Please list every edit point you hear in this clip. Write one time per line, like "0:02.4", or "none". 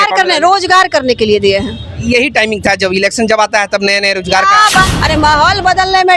0:04.8